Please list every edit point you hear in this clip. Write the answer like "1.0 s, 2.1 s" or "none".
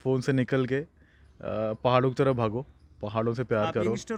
none

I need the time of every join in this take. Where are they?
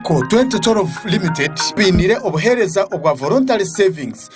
1.8 s

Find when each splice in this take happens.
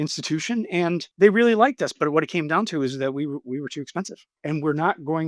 1.1 s, 4.3 s

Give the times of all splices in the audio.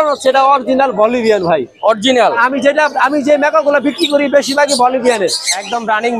5.2 s

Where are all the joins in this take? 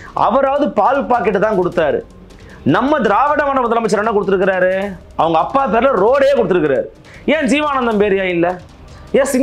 7.0 s

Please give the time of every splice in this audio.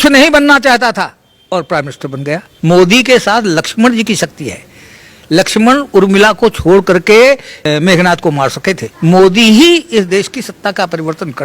2.5 s, 7.6 s, 8.9 s

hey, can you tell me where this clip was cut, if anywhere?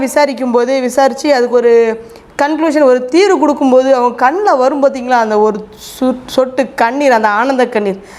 none

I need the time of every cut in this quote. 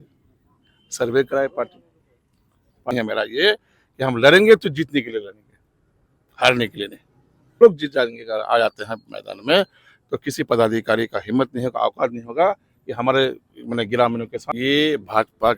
2.9 s, 7.6 s, 14.4 s

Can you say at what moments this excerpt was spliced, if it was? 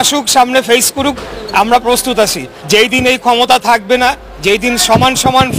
2.5 s

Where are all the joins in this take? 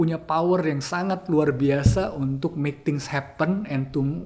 none

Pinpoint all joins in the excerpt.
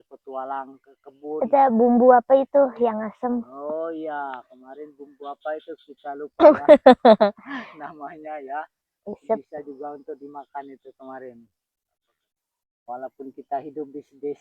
12.1 s

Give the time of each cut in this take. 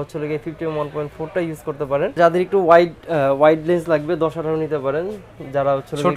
2.2 s

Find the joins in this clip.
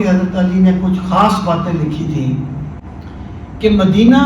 2.7 s

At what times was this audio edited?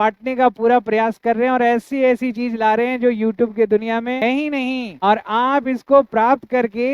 4.4 s

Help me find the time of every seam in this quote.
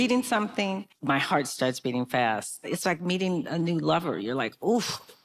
0.9 s, 2.6 s

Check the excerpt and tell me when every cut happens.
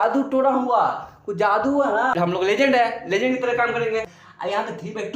2.1 s, 4.2 s

